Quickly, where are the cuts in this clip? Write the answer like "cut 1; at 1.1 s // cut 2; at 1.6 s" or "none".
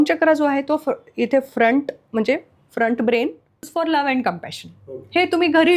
cut 1; at 3.6 s